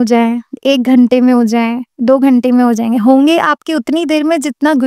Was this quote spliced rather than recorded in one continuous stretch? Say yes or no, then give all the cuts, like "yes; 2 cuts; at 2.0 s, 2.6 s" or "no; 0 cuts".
no; 0 cuts